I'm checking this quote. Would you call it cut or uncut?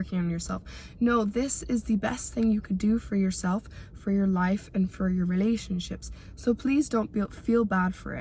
uncut